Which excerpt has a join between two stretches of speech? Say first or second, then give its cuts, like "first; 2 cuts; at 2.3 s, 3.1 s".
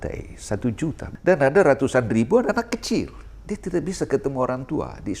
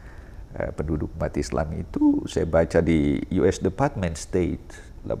first; 1 cut; at 1.1 s